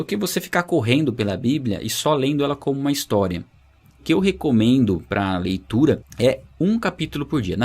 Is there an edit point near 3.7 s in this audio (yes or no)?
no